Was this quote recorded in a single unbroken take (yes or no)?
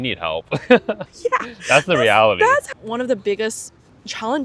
no